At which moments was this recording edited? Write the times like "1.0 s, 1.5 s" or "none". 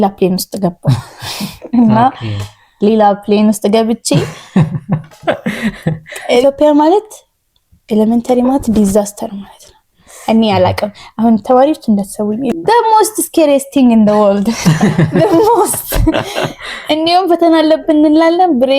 6.4 s, 12.5 s

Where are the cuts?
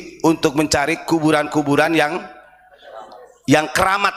none

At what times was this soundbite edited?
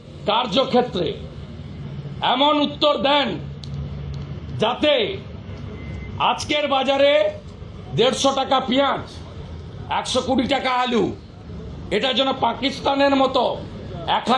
none

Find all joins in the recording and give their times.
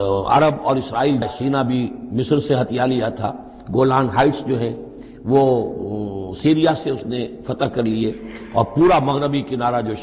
1.2 s

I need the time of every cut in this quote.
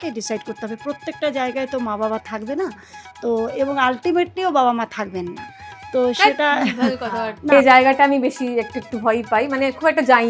7.4 s

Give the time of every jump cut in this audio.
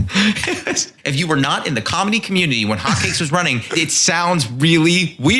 1.0 s, 3.7 s

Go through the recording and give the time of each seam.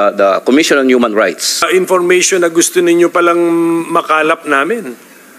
1.6 s

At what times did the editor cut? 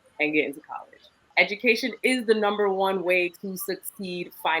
1.3 s

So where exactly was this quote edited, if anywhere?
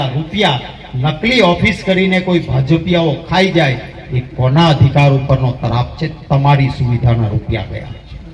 none

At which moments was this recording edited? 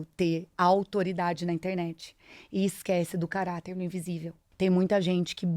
4.4 s

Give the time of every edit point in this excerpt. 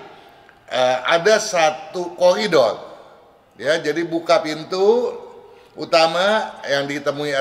none

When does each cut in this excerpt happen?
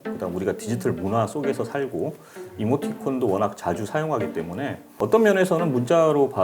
5.0 s

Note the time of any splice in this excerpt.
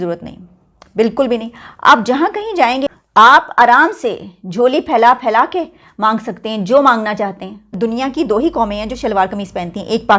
2.9 s, 7.7 s

